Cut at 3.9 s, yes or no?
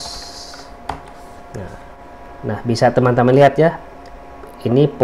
no